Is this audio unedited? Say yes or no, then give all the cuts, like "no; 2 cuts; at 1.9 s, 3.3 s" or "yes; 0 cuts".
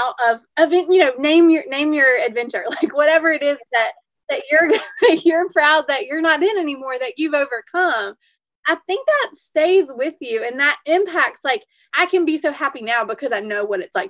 no; 1 cut; at 11.9 s